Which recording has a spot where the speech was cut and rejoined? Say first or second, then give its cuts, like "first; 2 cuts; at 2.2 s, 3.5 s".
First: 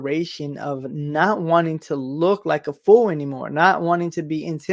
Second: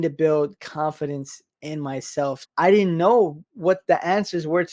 second; 1 cut; at 2.4 s